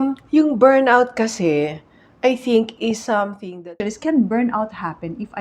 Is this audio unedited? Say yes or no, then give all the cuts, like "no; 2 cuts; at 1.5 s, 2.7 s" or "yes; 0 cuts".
no; 1 cut; at 3.8 s